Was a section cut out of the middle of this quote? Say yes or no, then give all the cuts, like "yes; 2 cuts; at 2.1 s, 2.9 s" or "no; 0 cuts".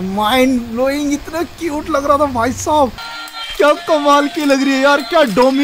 yes; 1 cut; at 3.0 s